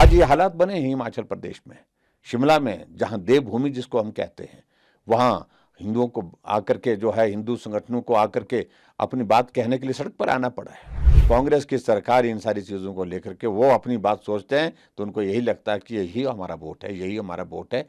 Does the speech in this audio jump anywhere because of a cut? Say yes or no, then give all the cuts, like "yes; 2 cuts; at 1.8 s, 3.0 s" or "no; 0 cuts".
yes; 1 cut; at 11.1 s